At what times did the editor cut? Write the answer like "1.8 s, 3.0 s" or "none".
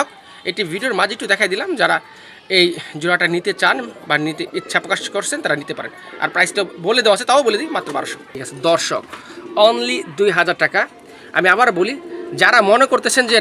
8.5 s